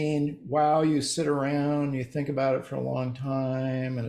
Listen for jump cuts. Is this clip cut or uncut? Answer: uncut